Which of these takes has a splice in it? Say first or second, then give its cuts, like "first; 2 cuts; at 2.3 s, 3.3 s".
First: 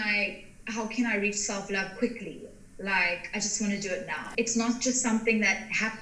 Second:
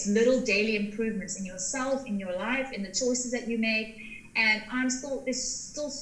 first; 1 cut; at 4.2 s